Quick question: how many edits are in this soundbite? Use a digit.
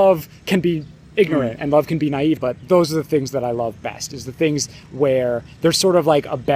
1